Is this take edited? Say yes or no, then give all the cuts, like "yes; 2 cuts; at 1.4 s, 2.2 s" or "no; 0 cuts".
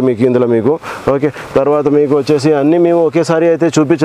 no; 0 cuts